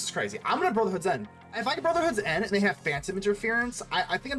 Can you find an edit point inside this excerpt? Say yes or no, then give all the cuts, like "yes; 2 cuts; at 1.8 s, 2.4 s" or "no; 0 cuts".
yes; 1 cut; at 1.6 s